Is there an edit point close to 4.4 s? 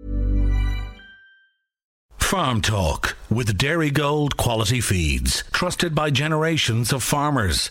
no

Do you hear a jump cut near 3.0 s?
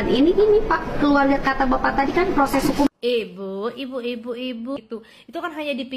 no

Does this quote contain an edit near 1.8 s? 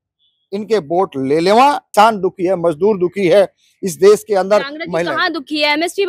yes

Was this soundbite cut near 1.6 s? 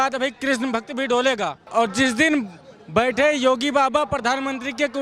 yes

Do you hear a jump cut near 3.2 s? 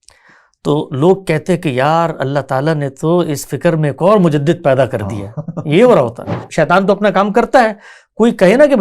no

